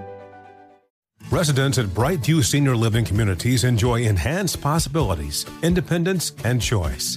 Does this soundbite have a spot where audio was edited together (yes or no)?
yes